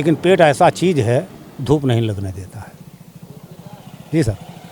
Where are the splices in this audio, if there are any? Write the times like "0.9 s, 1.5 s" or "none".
none